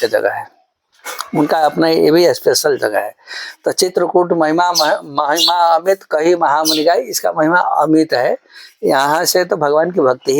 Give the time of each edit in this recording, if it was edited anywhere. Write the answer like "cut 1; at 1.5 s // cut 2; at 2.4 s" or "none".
none